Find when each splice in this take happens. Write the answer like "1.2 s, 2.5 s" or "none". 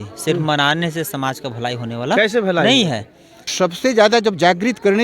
3.5 s